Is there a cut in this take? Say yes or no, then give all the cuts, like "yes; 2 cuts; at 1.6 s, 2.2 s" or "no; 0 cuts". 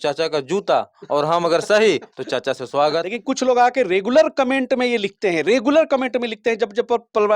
yes; 1 cut; at 3.1 s